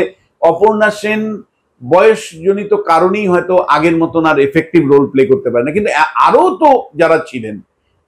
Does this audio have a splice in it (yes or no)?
no